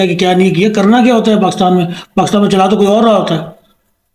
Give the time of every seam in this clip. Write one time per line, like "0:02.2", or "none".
none